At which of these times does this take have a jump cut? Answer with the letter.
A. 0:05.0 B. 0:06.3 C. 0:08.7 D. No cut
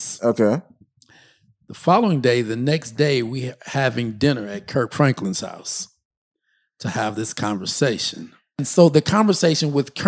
C